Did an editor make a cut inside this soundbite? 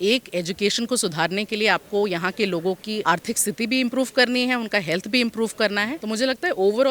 yes; 1 cut; at 5.9 s

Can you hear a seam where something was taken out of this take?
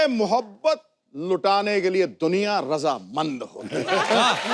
no; 0 cuts

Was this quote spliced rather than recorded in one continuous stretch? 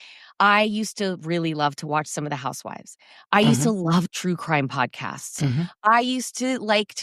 no; 0 cuts

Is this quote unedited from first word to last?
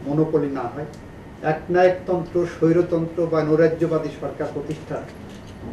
yes; 0 cuts

